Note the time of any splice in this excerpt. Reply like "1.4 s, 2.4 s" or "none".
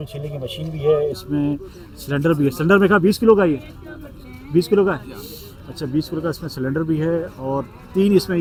none